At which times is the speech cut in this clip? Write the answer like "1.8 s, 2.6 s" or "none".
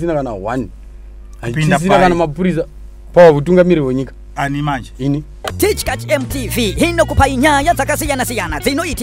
5.4 s